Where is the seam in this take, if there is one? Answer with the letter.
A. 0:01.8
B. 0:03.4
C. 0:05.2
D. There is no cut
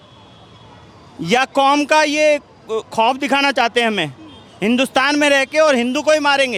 D